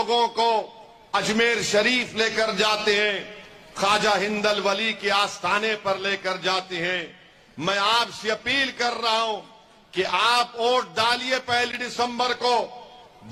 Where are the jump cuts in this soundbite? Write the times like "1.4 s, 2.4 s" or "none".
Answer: none